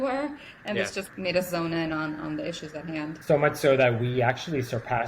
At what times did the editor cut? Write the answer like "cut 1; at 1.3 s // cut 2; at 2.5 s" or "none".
cut 1; at 1.1 s // cut 2; at 3.2 s